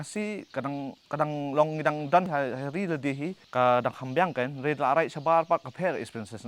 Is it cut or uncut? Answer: cut